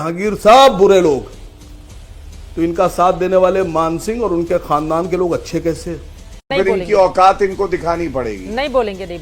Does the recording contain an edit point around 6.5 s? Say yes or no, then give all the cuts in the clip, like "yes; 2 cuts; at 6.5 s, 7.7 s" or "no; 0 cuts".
yes; 1 cut; at 6.5 s